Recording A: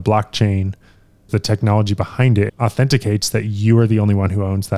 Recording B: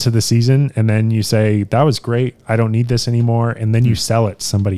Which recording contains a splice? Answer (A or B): A